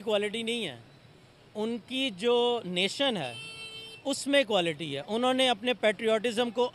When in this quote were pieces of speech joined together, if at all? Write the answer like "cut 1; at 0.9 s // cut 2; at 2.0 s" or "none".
none